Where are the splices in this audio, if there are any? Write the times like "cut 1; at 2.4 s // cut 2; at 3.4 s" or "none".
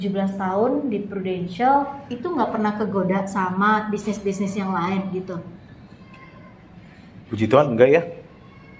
none